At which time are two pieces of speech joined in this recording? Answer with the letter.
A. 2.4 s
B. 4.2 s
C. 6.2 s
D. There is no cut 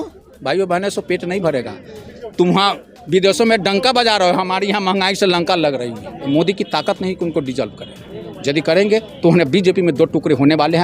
C